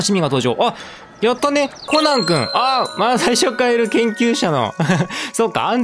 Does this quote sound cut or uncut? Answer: cut